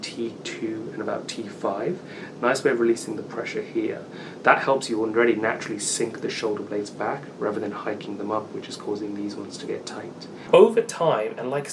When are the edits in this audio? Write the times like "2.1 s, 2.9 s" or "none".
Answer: 10.5 s

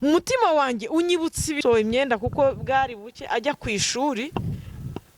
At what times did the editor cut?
1.5 s

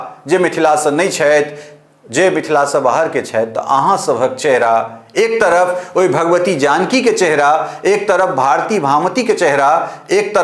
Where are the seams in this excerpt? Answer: none

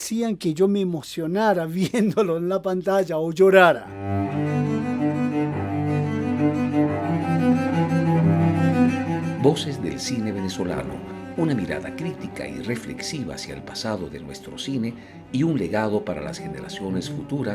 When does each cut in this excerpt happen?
3.9 s

